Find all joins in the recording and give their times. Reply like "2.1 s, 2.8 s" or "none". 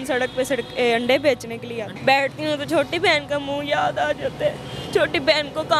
1.9 s